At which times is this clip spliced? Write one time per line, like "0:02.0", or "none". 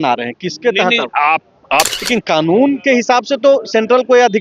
0:02.0